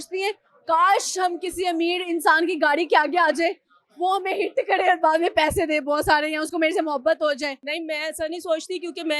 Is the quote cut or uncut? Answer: cut